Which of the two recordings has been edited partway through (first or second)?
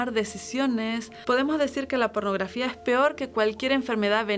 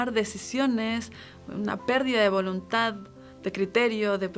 first